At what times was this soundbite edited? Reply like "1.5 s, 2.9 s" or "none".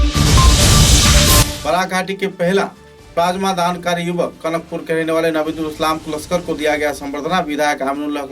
1.5 s

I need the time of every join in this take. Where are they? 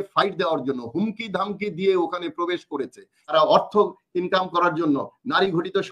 3.1 s

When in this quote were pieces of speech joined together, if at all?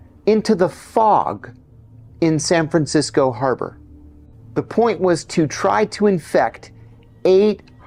none

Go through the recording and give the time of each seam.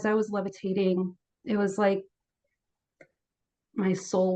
1.3 s

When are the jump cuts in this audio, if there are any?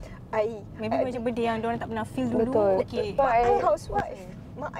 3.2 s

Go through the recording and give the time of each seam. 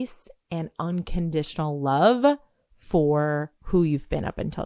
3.6 s

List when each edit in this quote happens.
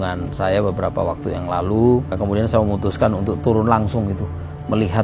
2.1 s

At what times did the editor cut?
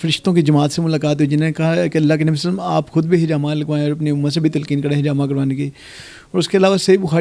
none

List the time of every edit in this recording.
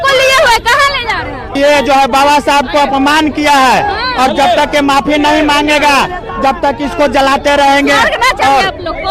1.4 s

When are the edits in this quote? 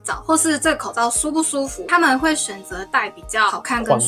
1.9 s

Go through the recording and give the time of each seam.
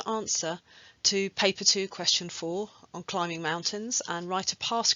4.0 s

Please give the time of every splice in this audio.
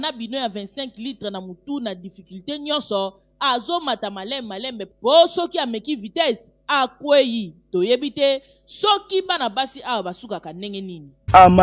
none

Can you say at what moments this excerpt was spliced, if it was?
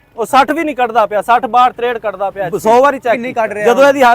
2.5 s, 3.3 s

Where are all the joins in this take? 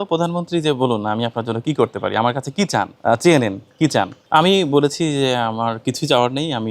2.9 s, 4.2 s

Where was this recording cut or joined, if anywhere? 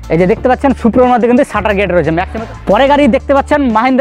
2.3 s

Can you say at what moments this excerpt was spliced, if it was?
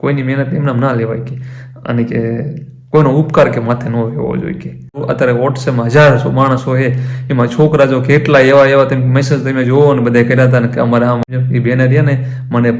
5.0 s, 11.2 s

